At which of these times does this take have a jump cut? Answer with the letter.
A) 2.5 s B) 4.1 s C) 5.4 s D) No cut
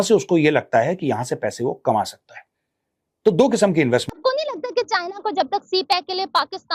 B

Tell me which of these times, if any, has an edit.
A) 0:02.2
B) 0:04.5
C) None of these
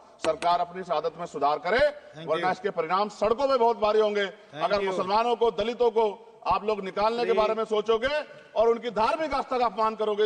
C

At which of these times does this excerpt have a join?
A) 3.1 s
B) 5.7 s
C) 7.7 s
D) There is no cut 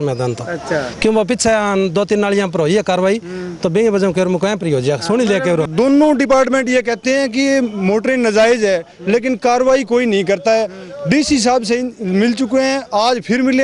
B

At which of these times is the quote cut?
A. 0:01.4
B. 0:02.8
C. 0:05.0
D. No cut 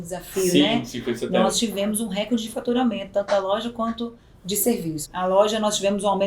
C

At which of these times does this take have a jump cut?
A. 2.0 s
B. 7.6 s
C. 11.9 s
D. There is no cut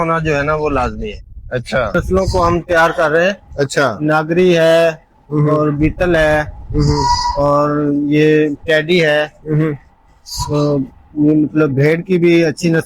A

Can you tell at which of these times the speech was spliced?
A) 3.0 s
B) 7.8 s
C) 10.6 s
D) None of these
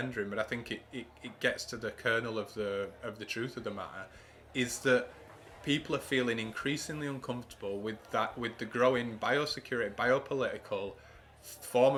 D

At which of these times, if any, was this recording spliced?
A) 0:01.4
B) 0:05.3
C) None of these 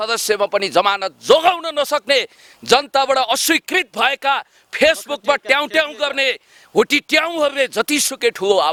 C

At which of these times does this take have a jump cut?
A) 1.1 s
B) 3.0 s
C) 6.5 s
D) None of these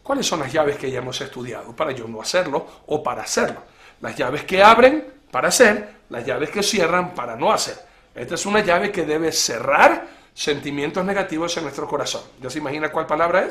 D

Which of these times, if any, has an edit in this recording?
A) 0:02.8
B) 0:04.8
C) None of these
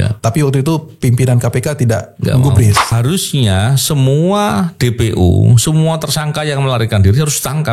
A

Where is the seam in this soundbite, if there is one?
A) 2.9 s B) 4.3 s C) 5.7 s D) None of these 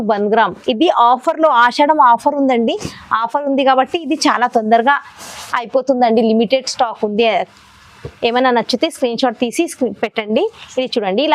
D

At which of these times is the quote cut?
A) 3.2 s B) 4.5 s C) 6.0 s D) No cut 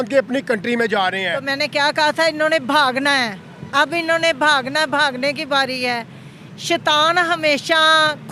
D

